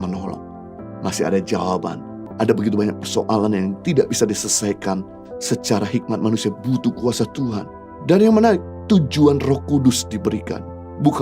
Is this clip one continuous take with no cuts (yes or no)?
no